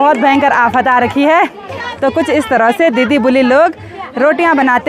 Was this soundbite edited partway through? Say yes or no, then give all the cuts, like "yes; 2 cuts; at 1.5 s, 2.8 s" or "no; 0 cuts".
no; 0 cuts